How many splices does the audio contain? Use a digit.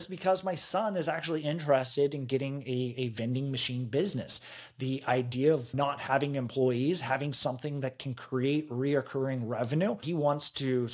2